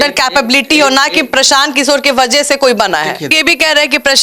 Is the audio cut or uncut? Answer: cut